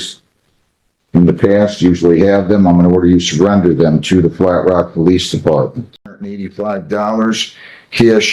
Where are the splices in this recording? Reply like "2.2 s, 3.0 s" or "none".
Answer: 6.3 s